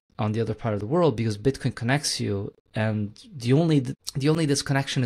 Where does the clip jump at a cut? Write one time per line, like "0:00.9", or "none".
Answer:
0:04.0